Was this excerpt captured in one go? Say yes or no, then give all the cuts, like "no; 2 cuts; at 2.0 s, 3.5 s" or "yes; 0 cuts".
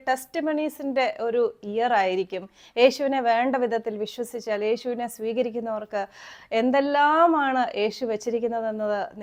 yes; 0 cuts